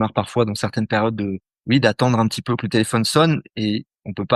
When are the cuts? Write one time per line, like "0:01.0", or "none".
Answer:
0:01.5